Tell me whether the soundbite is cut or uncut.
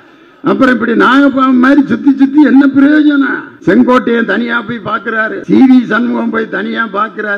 cut